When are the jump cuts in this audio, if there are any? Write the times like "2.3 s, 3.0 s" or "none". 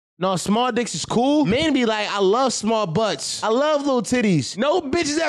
1.5 s, 3.3 s, 4.5 s